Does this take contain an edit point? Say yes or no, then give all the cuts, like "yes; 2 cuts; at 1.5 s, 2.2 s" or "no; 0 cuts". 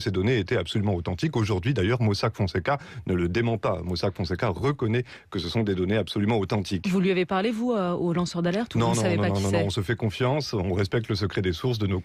yes; 1 cut; at 3.0 s